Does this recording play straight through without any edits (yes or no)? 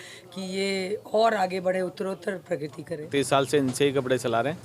no